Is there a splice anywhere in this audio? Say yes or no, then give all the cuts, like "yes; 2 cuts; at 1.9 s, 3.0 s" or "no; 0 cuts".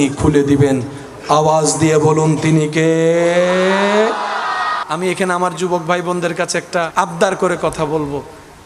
yes; 2 cuts; at 4.8 s, 6.9 s